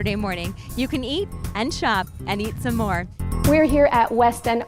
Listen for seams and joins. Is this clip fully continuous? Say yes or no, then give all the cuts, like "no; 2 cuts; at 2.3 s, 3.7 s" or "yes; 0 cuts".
no; 1 cut; at 3.2 s